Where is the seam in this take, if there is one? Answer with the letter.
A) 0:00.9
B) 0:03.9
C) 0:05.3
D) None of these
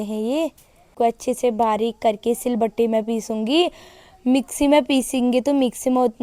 A